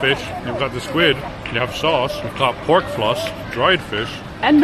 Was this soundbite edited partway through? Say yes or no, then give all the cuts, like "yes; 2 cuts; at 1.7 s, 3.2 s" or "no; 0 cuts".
yes; 3 cuts; at 1.3 s, 2.2 s, 3.4 s